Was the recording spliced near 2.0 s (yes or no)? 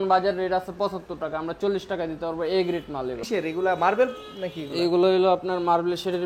no